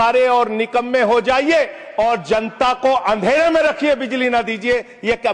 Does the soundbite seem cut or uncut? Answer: uncut